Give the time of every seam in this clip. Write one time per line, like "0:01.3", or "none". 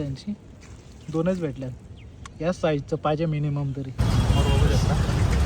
0:04.0